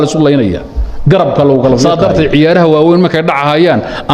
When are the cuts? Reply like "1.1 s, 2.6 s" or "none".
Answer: 1.8 s